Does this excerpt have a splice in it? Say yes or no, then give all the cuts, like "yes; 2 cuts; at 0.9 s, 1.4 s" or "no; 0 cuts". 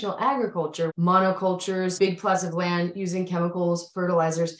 yes; 2 cuts; at 0.9 s, 1.9 s